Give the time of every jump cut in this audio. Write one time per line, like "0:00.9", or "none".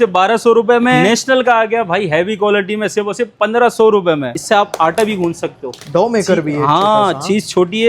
0:01.0
0:04.3